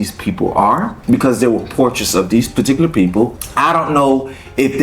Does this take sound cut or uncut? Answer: cut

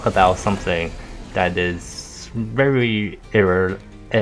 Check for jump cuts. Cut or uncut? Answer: uncut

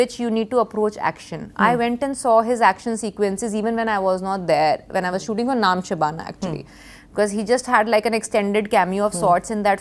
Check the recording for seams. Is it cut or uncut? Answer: uncut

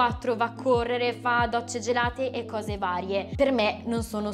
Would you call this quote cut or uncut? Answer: cut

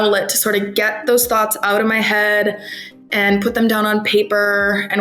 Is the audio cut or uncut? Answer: uncut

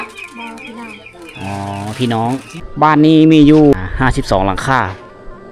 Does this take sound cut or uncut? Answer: cut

